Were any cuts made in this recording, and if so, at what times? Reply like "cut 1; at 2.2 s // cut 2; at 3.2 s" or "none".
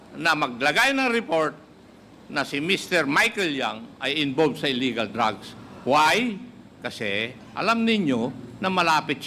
none